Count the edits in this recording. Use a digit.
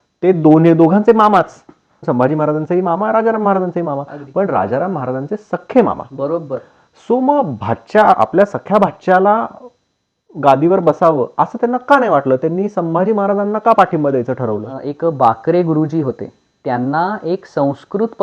1